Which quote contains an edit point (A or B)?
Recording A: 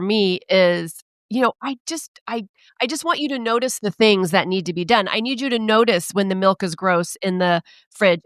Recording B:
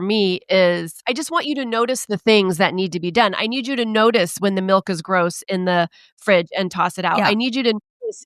B